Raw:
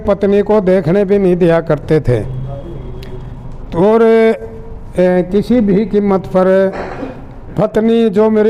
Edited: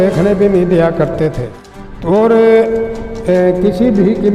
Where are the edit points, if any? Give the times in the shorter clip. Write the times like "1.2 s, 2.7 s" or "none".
1.4 s

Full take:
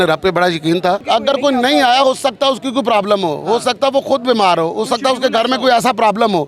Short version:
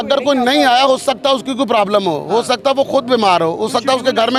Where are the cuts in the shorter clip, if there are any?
none

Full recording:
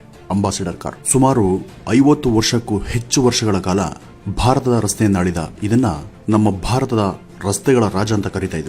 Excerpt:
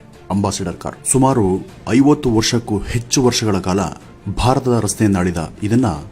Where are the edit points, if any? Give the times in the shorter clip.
none

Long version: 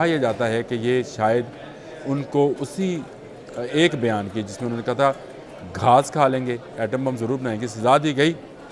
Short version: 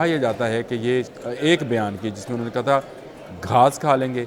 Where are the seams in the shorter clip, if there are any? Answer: 1.1 s

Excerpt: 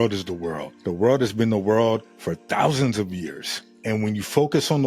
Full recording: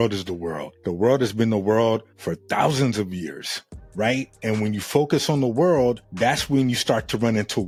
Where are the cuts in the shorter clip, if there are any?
3.7 s

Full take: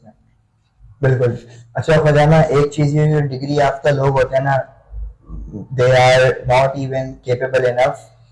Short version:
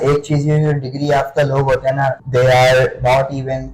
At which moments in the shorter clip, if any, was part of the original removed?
2.2 s

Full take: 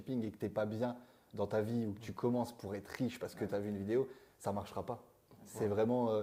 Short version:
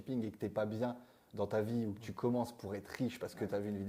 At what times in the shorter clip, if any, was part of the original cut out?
none

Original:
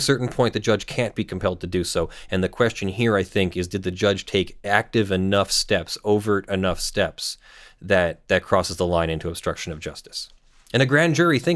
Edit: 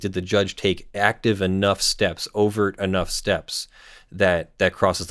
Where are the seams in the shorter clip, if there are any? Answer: none

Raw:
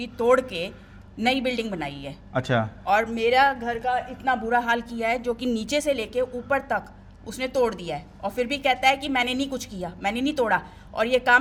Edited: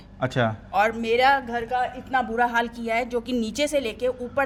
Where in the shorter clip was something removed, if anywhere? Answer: none

